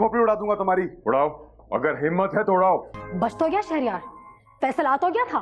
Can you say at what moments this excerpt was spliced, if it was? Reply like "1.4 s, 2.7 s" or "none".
3.0 s